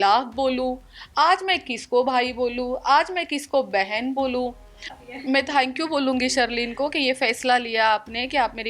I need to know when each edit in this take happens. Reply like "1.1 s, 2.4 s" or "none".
4.9 s